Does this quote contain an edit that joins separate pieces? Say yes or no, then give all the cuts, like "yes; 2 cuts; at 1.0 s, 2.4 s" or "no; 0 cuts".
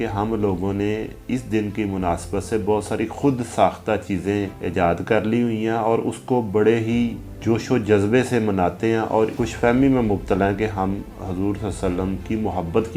yes; 3 cuts; at 4.6 s, 7.3 s, 9.3 s